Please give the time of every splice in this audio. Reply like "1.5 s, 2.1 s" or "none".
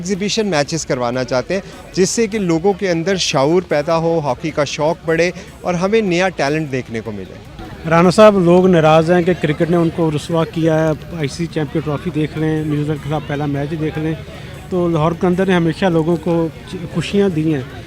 none